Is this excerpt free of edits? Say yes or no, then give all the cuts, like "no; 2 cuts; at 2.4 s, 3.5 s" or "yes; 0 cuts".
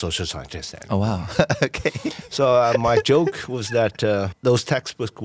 no; 1 cut; at 4.3 s